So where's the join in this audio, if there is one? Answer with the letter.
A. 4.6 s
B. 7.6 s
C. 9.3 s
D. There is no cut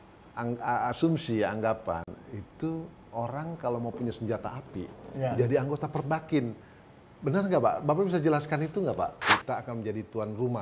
C